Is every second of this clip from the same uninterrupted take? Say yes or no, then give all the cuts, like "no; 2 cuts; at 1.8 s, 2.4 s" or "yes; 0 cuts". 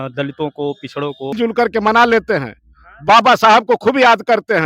no; 1 cut; at 1.3 s